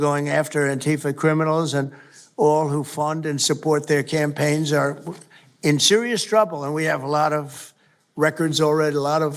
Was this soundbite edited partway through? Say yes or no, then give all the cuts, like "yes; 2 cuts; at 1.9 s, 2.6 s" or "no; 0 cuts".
no; 0 cuts